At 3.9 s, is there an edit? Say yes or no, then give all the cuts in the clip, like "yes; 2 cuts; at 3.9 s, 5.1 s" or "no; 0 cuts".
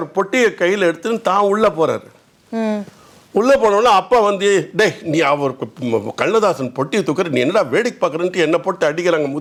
no; 0 cuts